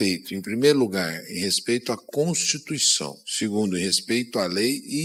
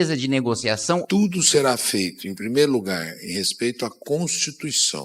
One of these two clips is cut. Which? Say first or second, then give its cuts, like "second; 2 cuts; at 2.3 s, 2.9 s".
second; 1 cut; at 1.0 s